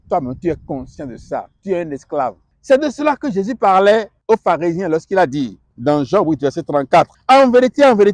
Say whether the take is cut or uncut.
cut